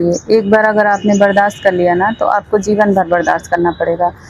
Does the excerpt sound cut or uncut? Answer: uncut